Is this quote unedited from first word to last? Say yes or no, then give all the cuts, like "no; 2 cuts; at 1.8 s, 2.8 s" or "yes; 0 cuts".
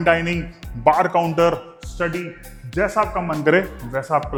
yes; 0 cuts